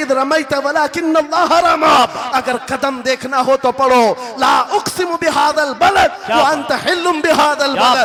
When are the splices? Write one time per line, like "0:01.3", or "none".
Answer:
none